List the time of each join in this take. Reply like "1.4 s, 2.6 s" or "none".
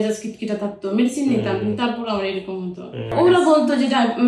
none